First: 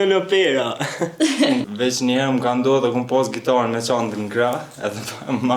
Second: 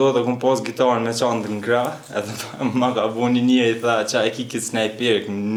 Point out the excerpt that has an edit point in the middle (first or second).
first